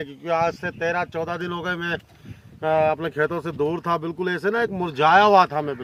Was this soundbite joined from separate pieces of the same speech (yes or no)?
no